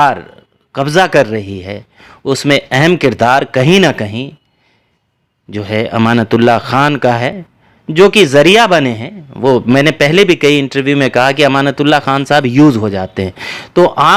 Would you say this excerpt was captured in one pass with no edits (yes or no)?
yes